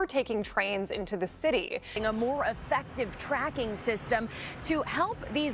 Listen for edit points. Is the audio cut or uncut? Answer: cut